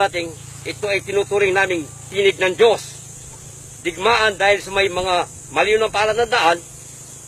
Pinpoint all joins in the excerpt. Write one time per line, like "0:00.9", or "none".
0:05.4